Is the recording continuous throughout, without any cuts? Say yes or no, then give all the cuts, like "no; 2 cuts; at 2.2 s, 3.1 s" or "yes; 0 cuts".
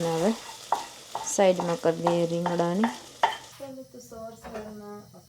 no; 1 cut; at 3.5 s